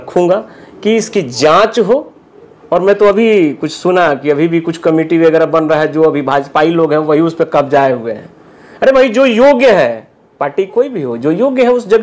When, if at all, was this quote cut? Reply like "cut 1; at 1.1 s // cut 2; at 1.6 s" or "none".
none